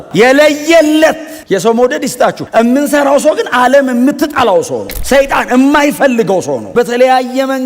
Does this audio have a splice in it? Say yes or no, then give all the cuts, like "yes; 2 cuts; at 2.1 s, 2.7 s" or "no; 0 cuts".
yes; 1 cut; at 6.7 s